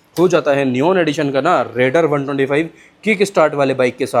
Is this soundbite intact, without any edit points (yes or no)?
yes